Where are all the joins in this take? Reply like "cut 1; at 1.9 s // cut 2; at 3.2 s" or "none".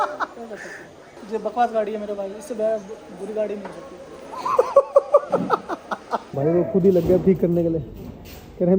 cut 1; at 1.0 s // cut 2; at 6.2 s